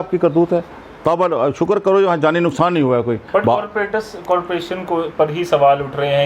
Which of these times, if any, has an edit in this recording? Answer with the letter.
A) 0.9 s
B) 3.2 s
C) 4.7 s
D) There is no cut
B